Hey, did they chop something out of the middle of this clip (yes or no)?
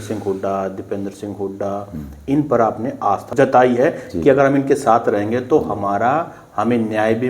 yes